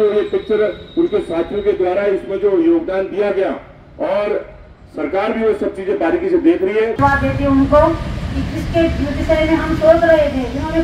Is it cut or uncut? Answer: cut